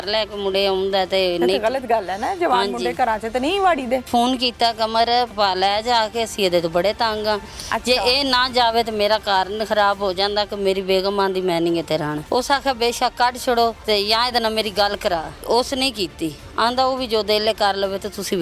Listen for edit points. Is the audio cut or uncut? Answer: cut